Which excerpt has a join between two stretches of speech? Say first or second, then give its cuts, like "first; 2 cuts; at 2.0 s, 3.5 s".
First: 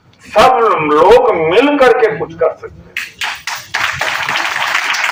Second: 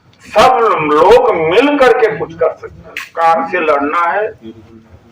second; 1 cut; at 3.0 s